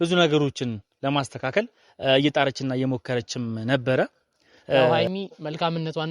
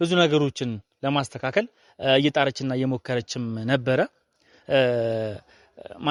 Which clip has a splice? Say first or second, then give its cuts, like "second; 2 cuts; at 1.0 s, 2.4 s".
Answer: first; 1 cut; at 5.0 s